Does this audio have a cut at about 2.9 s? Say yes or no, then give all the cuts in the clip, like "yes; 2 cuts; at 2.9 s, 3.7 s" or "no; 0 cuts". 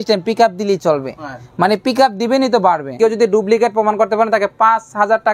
yes; 1 cut; at 2.9 s